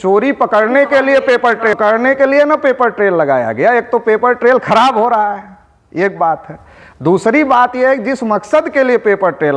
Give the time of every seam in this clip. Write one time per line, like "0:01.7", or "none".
none